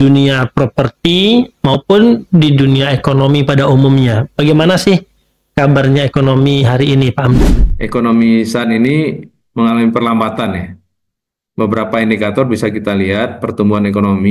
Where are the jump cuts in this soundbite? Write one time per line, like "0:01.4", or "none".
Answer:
0:07.4